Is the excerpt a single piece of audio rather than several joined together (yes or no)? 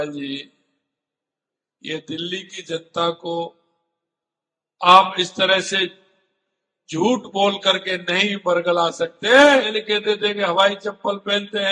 no